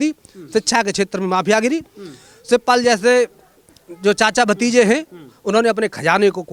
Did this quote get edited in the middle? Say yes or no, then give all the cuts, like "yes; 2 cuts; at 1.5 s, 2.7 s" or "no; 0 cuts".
no; 0 cuts